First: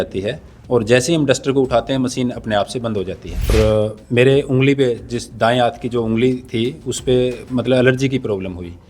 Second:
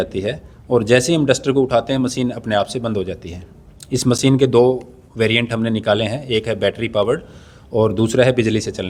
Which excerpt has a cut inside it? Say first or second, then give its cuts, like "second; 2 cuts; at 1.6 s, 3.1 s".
first; 1 cut; at 3.5 s